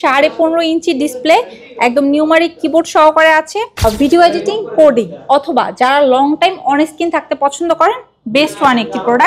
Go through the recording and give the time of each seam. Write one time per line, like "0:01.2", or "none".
0:03.8

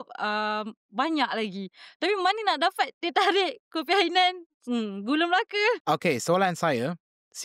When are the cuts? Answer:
0:05.8

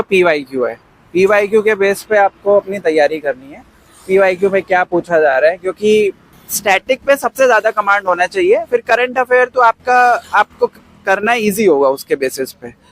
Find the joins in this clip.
0:06.3

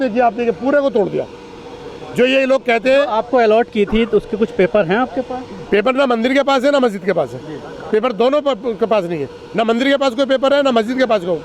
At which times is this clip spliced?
none

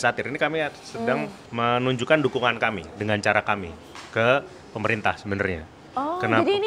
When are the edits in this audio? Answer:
0:01.4

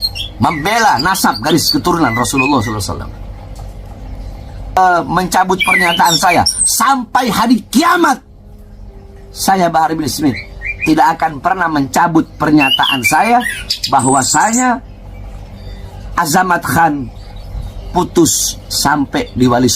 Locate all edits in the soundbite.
0:04.8

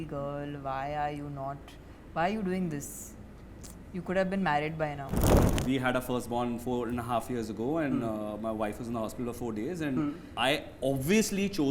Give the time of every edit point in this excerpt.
0:05.5
0:10.2

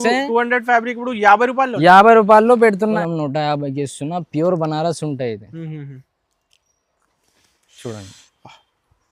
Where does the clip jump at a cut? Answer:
0:03.0

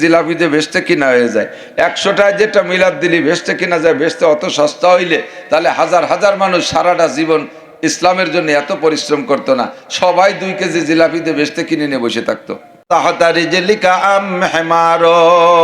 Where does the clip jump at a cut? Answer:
0:12.8

